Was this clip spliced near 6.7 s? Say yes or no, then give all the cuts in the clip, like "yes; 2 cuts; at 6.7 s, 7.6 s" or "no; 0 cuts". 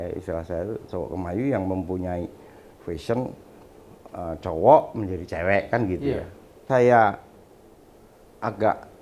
yes; 1 cut; at 6.7 s